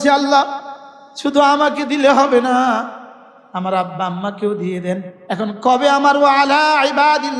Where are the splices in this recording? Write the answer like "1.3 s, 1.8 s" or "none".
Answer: 5.1 s